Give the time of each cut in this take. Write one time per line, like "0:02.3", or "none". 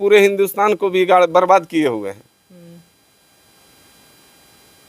none